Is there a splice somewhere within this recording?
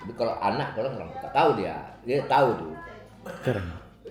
no; 0 cuts

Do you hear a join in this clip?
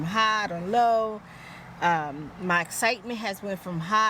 no; 0 cuts

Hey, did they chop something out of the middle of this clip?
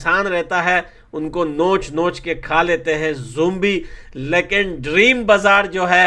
no; 0 cuts

